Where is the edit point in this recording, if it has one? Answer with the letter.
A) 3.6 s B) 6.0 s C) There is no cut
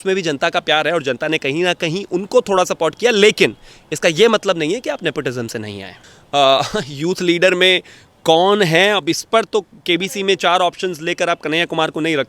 B